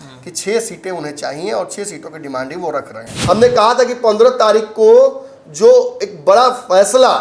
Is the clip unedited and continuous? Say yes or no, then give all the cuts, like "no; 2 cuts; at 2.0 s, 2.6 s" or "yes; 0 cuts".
no; 1 cut; at 3.1 s